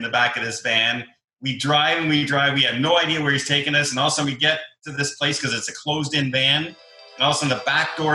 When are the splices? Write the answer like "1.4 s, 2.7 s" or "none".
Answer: none